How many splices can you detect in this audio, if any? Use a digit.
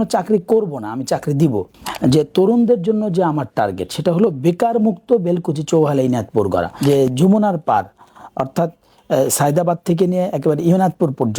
2